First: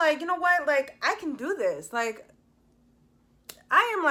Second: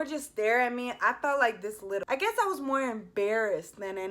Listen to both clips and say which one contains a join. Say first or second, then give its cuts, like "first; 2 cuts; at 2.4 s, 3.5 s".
second; 1 cut; at 2.0 s